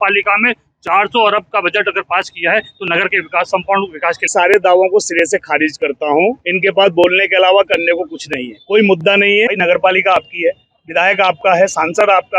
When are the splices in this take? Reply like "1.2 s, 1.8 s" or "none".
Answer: 4.3 s, 9.5 s